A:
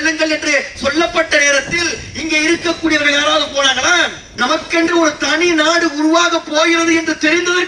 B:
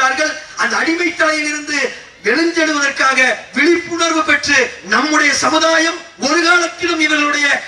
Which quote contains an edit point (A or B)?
A